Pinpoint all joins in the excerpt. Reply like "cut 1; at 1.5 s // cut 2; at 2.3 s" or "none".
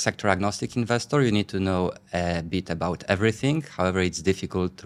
none